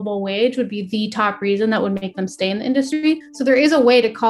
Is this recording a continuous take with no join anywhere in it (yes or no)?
no